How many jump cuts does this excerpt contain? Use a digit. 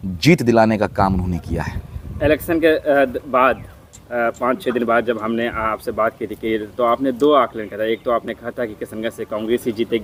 0